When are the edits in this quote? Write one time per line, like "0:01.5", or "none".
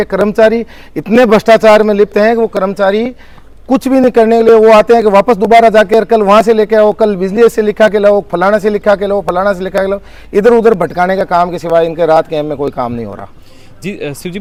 none